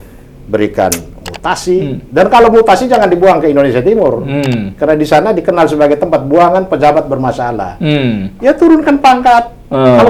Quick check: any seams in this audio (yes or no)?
no